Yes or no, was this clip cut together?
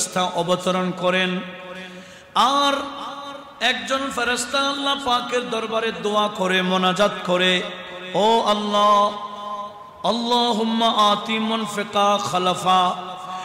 no